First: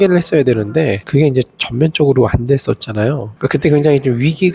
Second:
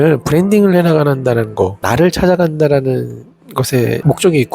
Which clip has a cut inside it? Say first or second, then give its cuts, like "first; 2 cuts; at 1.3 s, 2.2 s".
second; 1 cut; at 1.8 s